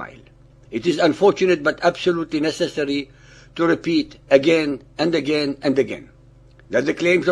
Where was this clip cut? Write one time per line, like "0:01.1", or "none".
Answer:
none